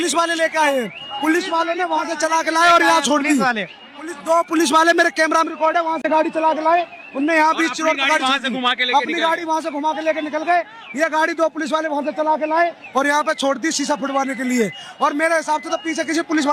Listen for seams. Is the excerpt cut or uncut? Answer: uncut